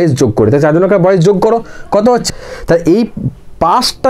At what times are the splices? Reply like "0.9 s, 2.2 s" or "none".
2.2 s

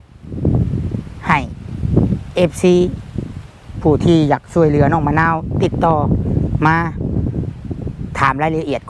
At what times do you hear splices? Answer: none

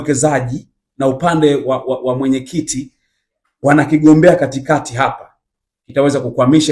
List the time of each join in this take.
none

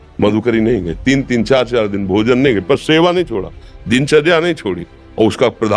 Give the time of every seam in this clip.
none

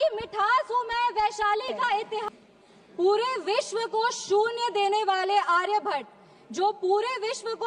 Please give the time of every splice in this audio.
2.2 s

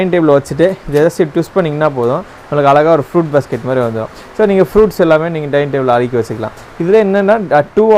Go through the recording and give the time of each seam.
none

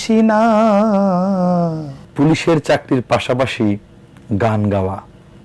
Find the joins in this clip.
2.0 s

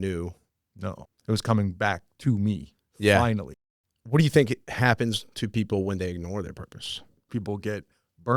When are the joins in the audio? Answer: 0.9 s, 3.5 s, 4.6 s, 7.3 s

